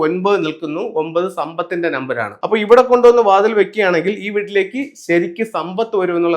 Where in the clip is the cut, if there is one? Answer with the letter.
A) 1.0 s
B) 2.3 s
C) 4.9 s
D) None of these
B